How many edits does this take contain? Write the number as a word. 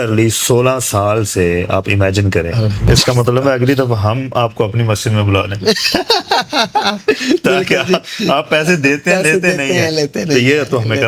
one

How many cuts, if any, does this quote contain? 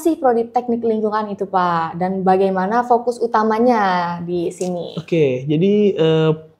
zero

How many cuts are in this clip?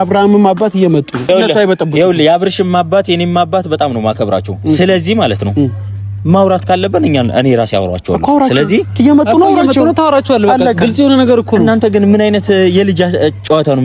zero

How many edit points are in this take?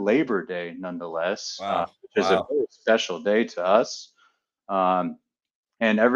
zero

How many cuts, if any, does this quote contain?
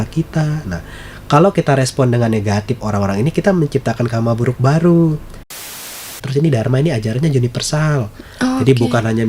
one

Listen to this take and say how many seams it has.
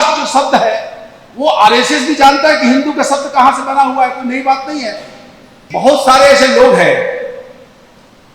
one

